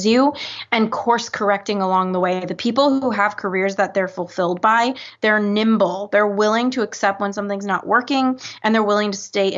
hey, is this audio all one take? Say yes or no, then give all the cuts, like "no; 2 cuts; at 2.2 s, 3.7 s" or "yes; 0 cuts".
yes; 0 cuts